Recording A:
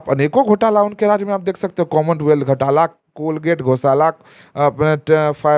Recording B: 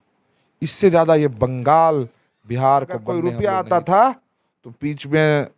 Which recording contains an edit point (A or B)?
B